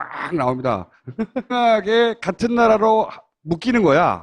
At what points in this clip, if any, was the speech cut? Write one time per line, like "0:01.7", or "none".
none